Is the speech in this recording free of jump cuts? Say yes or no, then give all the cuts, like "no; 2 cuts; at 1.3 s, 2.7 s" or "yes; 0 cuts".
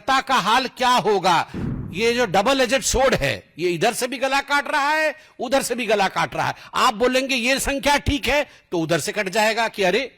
no; 1 cut; at 1.6 s